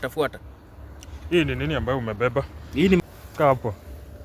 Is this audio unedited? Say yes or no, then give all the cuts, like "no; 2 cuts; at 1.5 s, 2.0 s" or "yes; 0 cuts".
no; 1 cut; at 3.0 s